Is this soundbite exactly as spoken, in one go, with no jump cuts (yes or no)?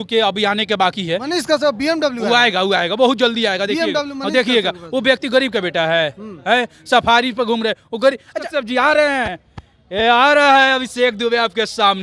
no